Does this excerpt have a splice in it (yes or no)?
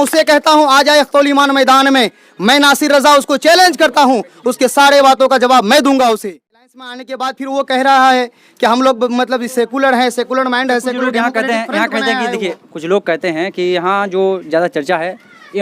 yes